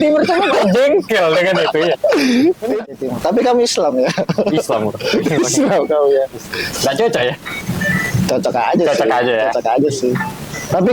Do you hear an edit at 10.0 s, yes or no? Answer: no